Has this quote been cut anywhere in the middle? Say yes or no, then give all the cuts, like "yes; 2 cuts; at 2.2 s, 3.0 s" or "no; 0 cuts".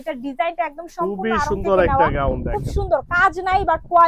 no; 0 cuts